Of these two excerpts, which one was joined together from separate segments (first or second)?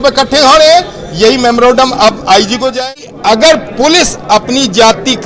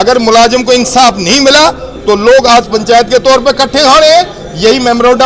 first